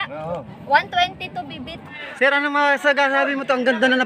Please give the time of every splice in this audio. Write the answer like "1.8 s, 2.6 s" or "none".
2.2 s